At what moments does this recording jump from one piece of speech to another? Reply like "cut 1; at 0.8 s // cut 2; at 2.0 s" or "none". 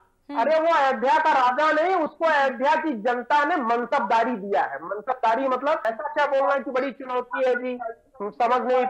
cut 1; at 5.8 s